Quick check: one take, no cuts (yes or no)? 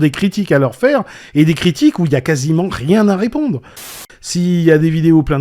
no